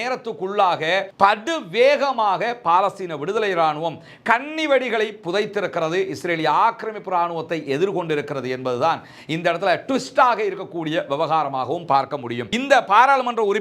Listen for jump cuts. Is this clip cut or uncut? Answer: cut